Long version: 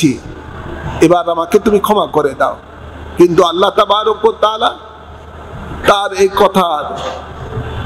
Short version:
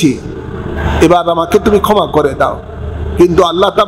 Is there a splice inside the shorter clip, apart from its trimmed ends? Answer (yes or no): no